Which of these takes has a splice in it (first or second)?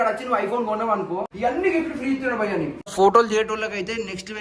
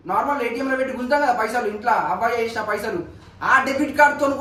first